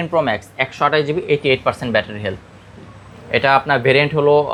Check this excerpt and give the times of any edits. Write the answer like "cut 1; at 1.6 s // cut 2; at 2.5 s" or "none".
none